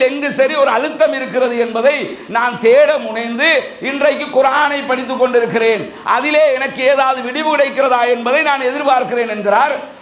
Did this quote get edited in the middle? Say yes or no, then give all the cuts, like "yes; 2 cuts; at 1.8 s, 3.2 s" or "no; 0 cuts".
no; 0 cuts